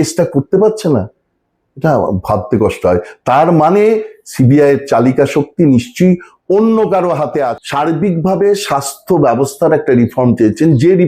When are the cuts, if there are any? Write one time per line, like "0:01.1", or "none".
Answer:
0:07.6